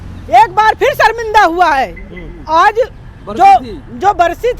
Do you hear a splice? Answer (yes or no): no